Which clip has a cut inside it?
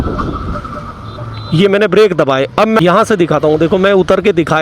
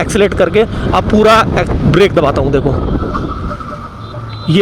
first; 1 cut; at 2.8 s

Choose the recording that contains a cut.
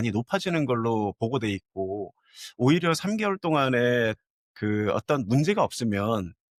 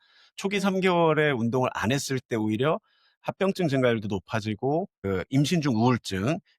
second; 1 cut; at 5.0 s

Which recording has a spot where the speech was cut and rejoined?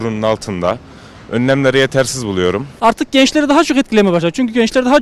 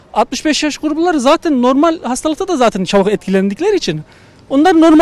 first; 1 cut; at 2.7 s

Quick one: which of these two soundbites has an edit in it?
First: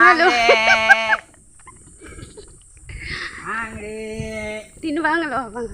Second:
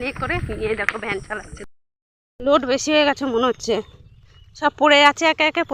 second; 1 cut; at 1.6 s

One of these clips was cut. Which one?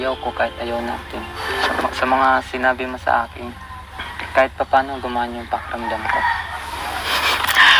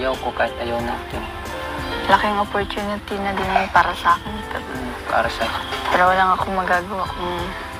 first; 2 cuts; at 1.4 s, 6.6 s

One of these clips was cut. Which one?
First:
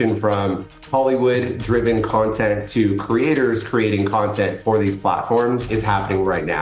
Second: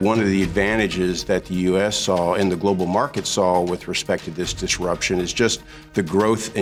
first; 1 cut; at 5.7 s

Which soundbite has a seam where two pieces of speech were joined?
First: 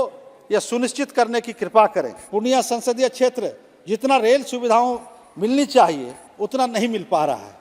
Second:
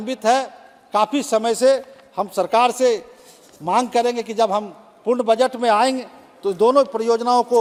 first; 1 cut; at 2.2 s

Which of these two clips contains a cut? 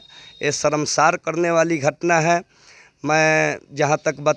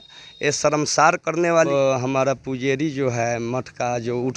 second; 1 cut; at 1.7 s

